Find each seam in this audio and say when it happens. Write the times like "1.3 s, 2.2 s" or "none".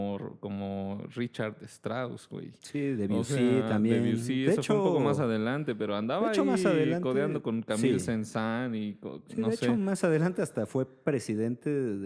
none

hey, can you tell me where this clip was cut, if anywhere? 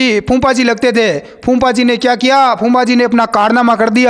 none

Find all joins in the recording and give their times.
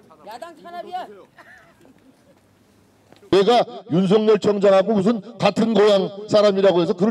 3.3 s

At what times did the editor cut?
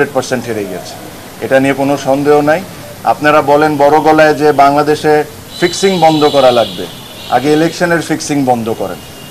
none

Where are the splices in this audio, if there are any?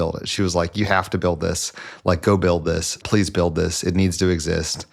none

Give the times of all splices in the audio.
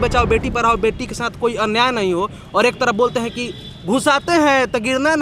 none

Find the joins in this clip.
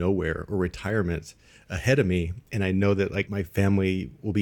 2.4 s, 3.3 s

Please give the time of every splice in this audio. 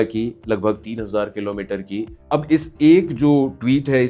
2.2 s

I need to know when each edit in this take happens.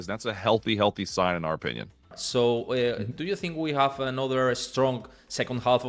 2.2 s

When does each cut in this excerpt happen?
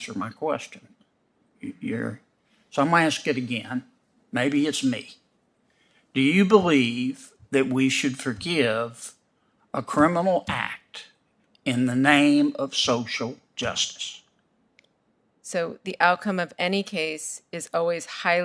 14.7 s

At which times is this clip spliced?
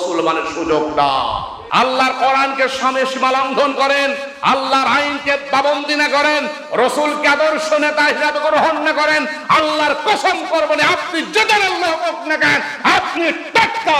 1.6 s

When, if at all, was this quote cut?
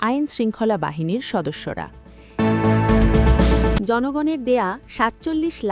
2.2 s, 3.8 s

